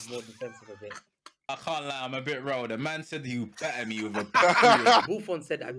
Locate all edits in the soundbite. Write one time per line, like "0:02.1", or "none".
0:01.5
0:05.0

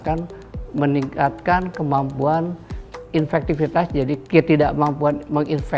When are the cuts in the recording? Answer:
0:03.0
0:04.2

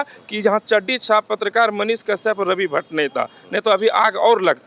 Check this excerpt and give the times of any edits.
none

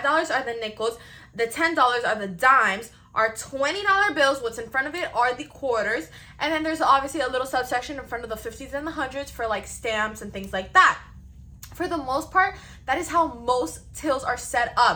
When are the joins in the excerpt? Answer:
none

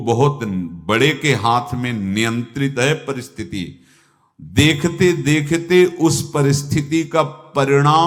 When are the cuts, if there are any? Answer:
none

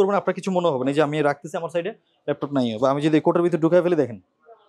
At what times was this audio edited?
none

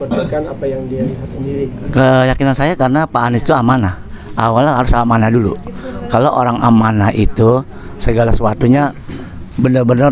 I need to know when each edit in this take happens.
0:01.8

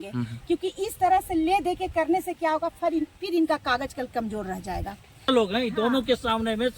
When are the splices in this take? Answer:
0:05.2

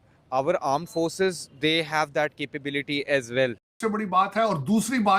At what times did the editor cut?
0:03.7

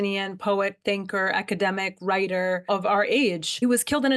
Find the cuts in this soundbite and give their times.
none

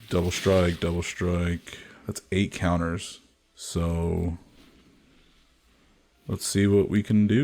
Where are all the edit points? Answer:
0:06.1

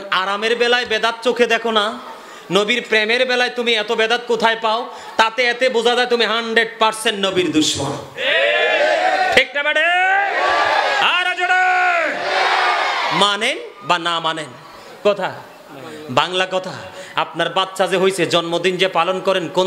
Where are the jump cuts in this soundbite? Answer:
0:15.0

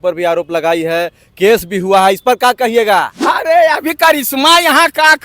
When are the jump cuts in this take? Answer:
0:03.1

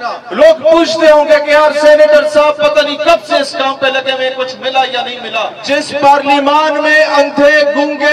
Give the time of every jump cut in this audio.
0:05.6

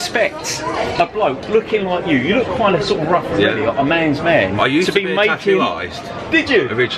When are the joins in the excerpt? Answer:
none

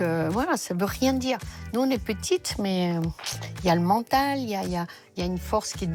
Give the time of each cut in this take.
none

